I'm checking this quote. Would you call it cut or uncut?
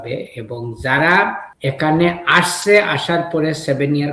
cut